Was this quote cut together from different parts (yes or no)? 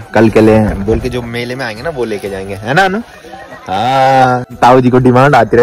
yes